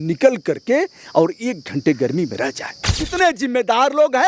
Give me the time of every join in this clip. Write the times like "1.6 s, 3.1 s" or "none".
3.0 s